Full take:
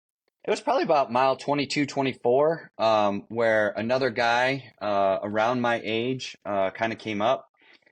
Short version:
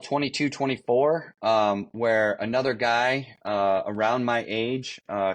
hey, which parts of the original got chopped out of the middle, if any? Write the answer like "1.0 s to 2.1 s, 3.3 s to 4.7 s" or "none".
none